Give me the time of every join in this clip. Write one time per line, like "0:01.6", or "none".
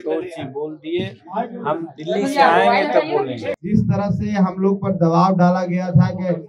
0:03.4